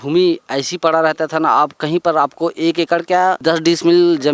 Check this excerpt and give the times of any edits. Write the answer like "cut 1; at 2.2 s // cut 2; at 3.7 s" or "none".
cut 1; at 3.4 s